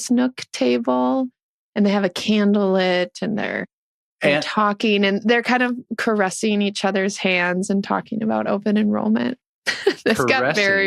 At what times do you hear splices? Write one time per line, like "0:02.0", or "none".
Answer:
none